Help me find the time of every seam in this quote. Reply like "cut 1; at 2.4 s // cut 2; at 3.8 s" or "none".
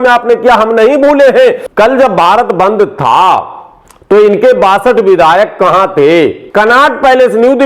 cut 1; at 1.6 s // cut 2; at 6.4 s